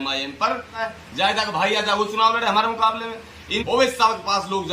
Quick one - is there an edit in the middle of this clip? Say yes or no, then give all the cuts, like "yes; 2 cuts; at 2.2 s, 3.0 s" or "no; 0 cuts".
yes; 2 cuts; at 0.8 s, 3.5 s